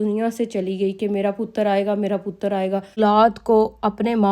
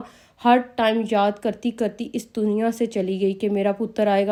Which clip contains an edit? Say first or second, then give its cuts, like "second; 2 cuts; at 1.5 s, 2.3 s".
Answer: first; 1 cut; at 3.0 s